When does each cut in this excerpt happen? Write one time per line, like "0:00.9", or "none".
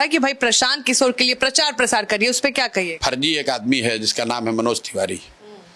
0:02.9